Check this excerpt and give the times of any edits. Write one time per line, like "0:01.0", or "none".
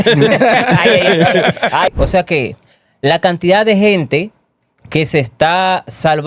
0:01.9